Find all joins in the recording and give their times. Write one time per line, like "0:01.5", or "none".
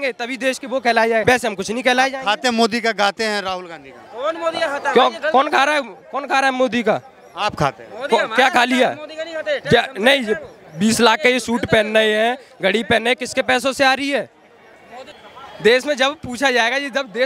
0:01.2
0:15.2

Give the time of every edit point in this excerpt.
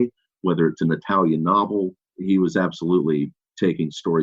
0:02.1

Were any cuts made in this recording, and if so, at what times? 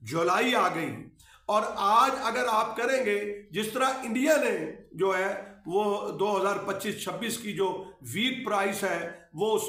none

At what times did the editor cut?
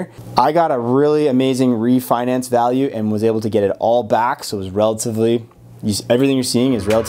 none

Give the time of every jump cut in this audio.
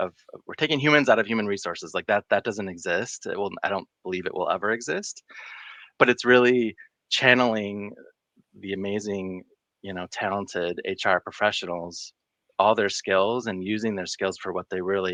none

